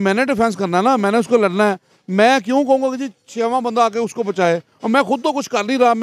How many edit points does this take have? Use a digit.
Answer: 0